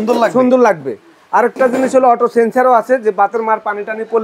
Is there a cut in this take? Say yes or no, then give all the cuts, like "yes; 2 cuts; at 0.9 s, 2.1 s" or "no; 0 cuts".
no; 0 cuts